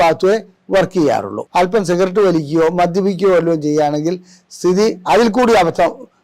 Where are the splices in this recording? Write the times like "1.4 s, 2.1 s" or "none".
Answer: 1.4 s